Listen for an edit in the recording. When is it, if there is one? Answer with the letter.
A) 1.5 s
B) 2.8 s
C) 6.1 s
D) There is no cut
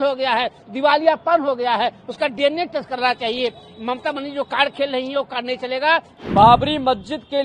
C